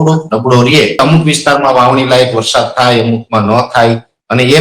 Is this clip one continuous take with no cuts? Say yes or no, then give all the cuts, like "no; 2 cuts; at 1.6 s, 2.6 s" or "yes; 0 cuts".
no; 1 cut; at 1.0 s